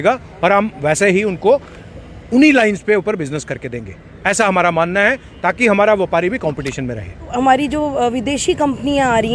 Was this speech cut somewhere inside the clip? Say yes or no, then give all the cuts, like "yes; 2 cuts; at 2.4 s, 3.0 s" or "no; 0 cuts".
yes; 1 cut; at 7.3 s